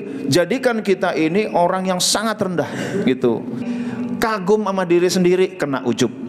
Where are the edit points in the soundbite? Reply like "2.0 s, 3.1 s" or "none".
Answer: 3.6 s